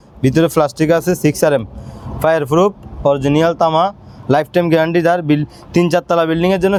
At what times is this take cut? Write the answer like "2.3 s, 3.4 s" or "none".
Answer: none